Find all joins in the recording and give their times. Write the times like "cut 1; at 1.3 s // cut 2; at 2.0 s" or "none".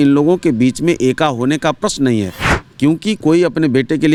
none

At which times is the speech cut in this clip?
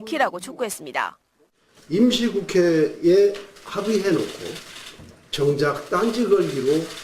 cut 1; at 2.7 s

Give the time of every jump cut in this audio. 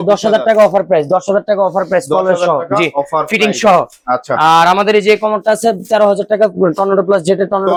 none

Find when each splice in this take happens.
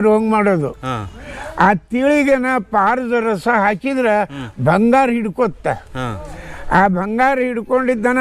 none

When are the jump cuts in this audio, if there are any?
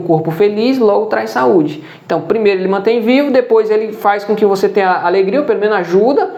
none

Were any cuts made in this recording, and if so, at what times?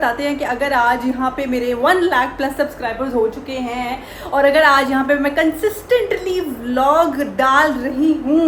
none

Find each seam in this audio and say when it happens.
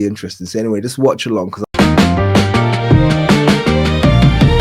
cut 1; at 1.5 s

